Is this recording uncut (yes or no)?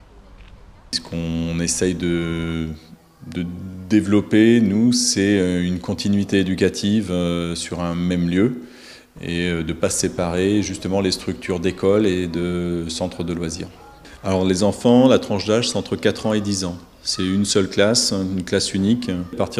yes